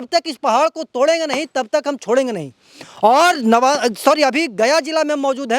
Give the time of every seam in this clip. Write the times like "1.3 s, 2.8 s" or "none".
none